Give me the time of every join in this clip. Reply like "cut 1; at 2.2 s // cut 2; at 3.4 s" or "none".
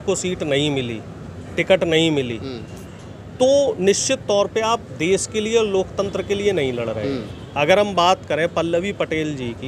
none